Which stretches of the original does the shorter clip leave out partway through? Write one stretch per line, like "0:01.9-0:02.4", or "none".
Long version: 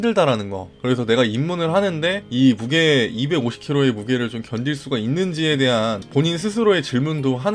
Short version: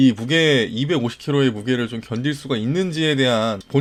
none

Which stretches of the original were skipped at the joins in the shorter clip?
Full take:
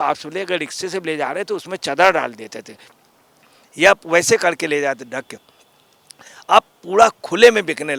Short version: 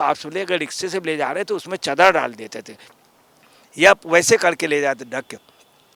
none

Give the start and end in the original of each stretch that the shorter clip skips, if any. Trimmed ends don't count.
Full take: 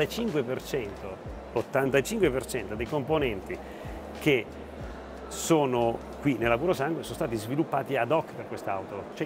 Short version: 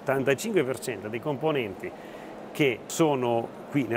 0:04.5-0:05.4

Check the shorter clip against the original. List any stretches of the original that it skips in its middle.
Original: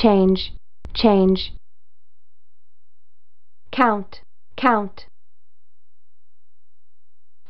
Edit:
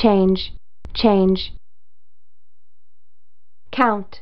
none

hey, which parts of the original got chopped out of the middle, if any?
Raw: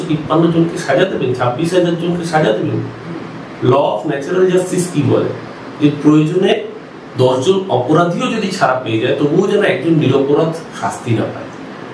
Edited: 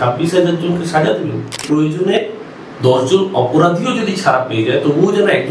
0:03.0-0:06.0

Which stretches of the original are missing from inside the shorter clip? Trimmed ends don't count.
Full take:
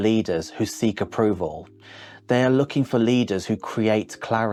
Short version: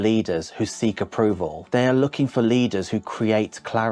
0:01.6-0:02.2

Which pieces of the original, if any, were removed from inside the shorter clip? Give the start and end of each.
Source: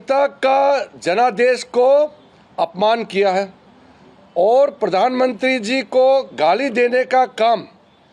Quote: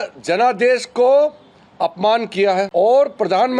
0:03.5-0:04.3

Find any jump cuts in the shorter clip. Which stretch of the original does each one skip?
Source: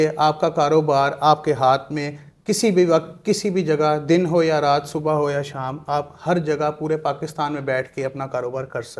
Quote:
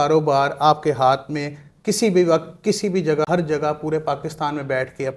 0:03.9-0:06.2

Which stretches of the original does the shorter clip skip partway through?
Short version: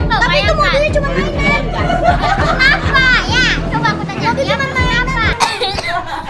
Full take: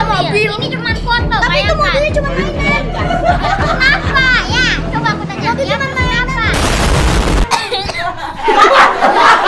0:06.5-0:07.4

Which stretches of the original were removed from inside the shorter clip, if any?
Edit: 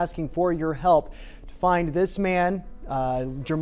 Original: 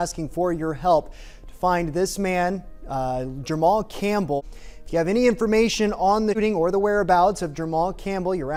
none

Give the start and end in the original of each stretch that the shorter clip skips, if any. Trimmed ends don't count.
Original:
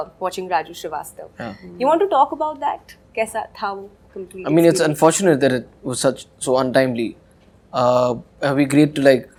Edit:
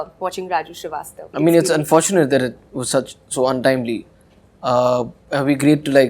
0:01.2-0:04.3

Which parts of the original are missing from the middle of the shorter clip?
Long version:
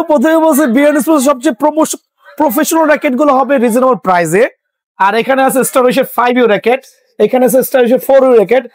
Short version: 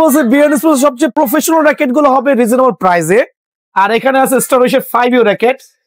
0:01.6-0:02.4

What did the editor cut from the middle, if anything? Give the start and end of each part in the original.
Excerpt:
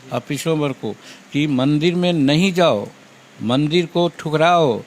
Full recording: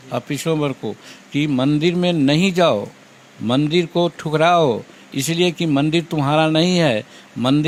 none

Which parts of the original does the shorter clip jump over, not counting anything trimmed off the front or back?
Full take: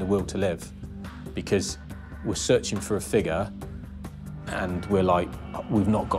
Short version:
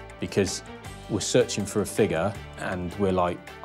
0:03.6-0:04.4

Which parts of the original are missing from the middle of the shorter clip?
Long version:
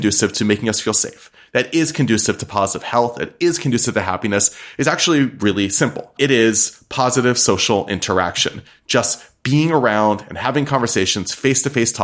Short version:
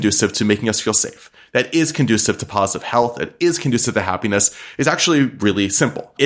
none

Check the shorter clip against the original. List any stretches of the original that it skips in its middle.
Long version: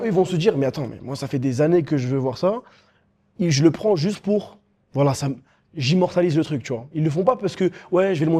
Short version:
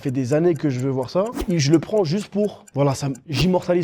0:02.7-0:03.3
0:04.8-0:05.4

